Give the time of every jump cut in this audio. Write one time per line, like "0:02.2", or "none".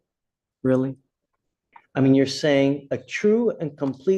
0:01.7